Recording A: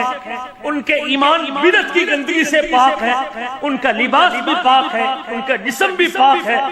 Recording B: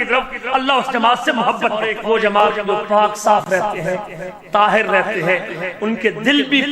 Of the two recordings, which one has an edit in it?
B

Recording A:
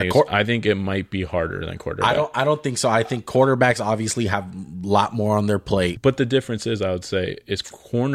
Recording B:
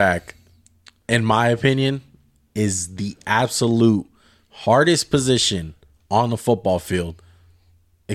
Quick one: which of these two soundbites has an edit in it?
A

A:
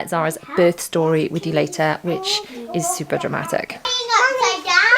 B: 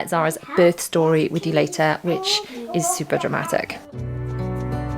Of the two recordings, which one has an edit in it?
A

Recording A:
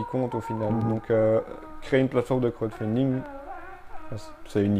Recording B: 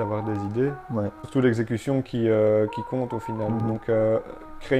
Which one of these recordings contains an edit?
B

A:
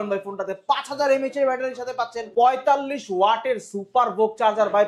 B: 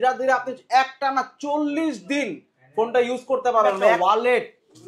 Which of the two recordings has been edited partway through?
B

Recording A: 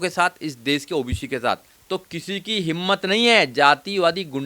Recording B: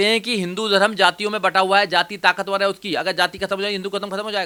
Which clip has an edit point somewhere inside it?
A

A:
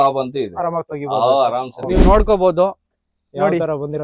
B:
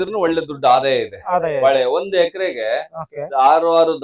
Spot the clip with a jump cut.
A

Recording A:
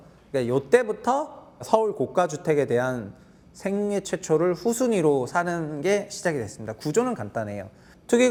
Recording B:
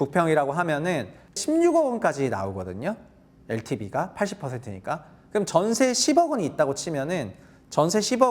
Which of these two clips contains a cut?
B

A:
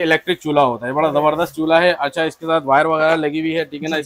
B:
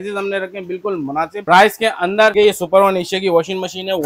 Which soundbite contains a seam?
B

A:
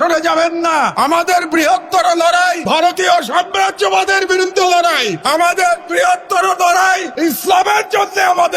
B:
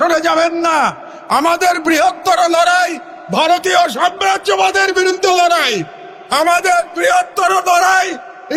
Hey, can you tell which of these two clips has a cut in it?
A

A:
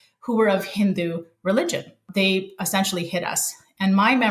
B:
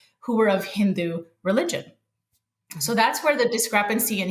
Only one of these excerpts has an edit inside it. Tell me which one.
A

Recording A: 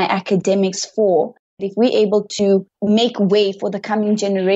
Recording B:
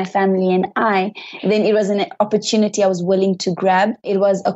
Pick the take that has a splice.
A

